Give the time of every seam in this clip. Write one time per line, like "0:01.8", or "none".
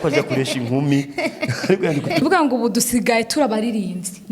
0:02.2

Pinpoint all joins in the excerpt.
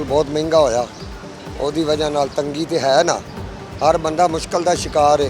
none

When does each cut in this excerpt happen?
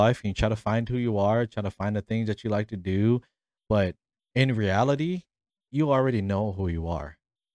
none

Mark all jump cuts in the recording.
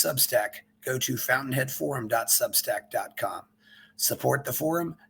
none

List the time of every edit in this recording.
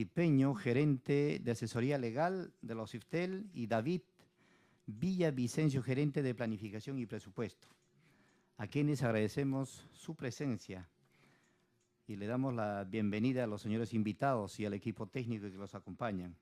none

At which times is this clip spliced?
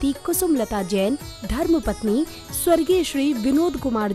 none

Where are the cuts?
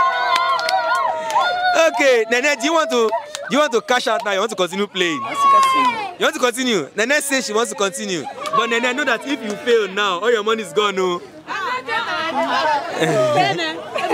0:08.3

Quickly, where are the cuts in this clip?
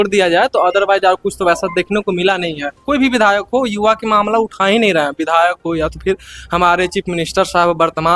0:02.8

